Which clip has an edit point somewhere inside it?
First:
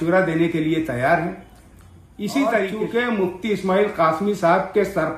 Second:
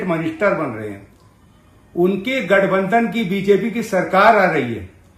first; 1 cut; at 2.8 s

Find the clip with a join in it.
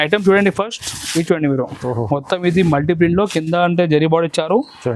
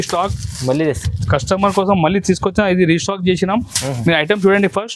first; 1 cut; at 1.7 s

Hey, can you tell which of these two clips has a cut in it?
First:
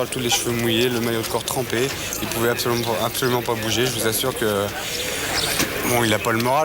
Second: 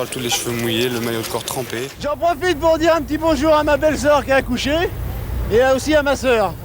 second; 1 cut; at 2.0 s

